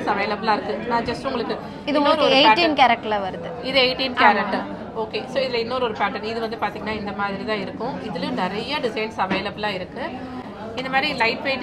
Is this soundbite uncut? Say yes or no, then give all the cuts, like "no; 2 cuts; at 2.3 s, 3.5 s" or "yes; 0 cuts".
yes; 0 cuts